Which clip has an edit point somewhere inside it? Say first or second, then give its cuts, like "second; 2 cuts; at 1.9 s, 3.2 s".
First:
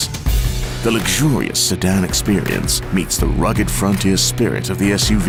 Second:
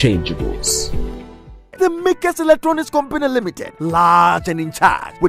second; 1 cut; at 1.7 s